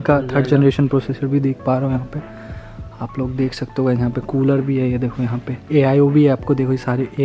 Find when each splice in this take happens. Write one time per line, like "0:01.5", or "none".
none